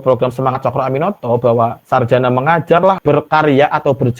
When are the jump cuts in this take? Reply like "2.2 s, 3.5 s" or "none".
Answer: 1.8 s, 3.0 s